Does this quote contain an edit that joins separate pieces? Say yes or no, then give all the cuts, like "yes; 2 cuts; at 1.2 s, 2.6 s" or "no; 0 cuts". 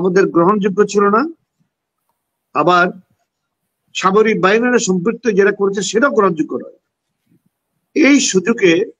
no; 0 cuts